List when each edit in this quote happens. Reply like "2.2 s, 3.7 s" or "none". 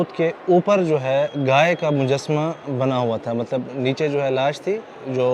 none